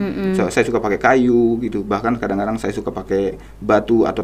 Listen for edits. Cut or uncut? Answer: uncut